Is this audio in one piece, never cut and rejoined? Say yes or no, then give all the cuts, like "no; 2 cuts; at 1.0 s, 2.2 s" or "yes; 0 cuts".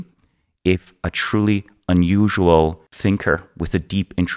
no; 1 cut; at 2.9 s